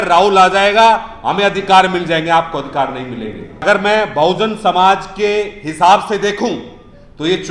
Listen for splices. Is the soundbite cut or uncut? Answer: cut